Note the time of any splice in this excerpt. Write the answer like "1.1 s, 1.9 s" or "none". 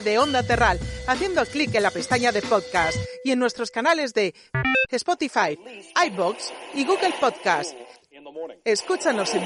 none